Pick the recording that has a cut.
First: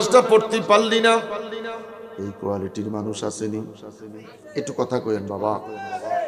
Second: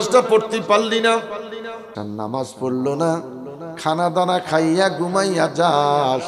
second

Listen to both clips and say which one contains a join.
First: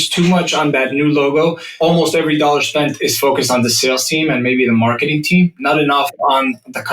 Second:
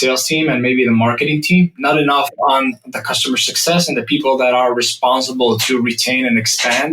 first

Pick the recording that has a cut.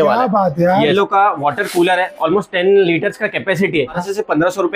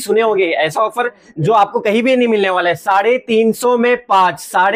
first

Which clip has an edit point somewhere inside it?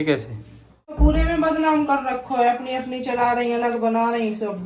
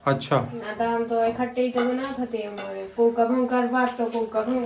first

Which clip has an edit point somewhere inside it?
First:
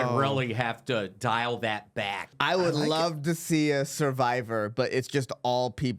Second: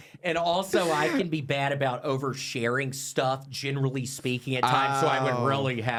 first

